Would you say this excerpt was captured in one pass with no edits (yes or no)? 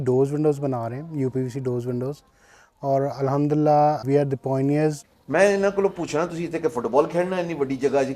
no